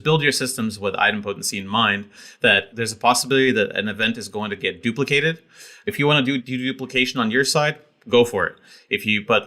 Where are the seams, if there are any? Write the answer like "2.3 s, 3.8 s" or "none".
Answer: none

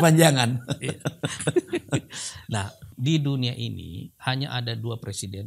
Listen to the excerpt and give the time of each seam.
2.9 s

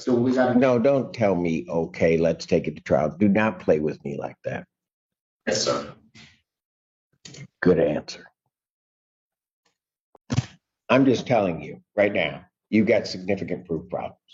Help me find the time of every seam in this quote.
none

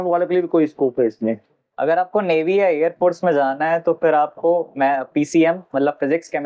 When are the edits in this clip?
none

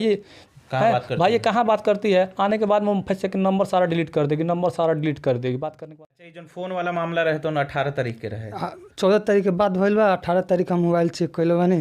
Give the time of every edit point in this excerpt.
5.9 s

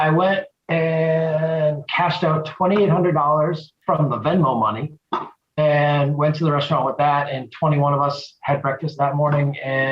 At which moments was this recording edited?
3.7 s, 8.9 s

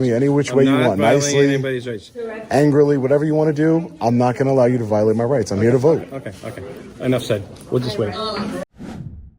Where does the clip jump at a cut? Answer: none

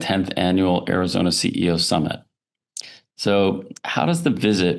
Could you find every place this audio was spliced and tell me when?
none

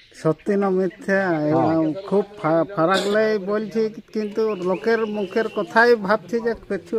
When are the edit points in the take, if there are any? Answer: none

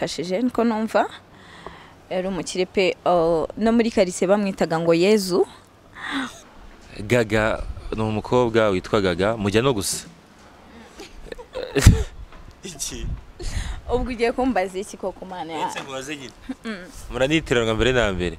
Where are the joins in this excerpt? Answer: 6.3 s

